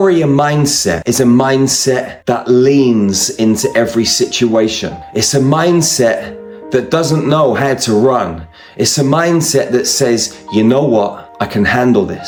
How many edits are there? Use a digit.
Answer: 0